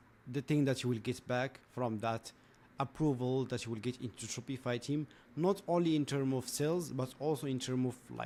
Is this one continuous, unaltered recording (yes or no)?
yes